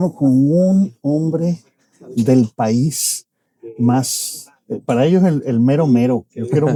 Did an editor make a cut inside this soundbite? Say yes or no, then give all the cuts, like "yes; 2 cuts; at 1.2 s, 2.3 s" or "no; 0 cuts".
no; 0 cuts